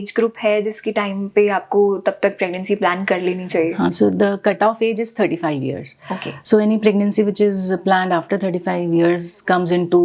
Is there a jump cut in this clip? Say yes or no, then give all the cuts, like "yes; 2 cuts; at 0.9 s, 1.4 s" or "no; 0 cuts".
no; 0 cuts